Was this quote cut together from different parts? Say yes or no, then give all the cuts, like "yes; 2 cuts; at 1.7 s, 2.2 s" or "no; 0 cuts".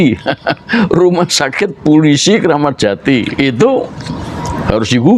no; 0 cuts